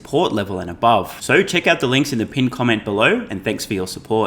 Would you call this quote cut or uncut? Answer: uncut